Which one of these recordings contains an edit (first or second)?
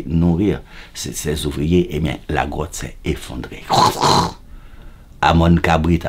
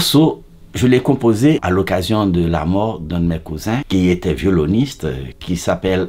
second